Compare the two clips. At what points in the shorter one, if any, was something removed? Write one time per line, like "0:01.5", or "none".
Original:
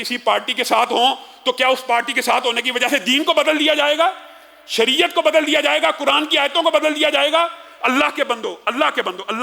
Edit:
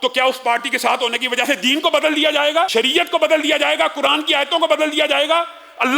0:02.7